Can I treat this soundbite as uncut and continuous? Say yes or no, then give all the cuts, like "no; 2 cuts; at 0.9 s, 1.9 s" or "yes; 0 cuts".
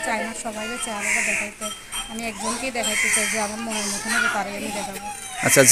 yes; 0 cuts